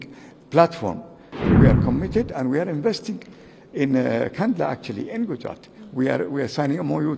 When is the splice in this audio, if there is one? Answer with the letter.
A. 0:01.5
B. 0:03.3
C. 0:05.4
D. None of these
A